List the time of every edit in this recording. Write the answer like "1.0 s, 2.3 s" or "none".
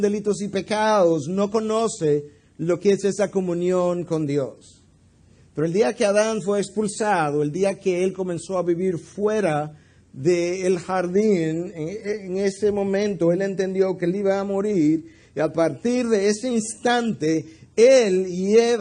none